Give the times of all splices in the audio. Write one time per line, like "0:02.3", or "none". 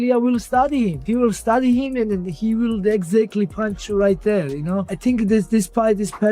0:01.0
0:04.9